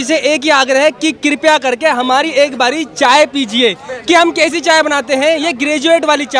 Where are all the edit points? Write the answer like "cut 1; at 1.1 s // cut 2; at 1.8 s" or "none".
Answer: none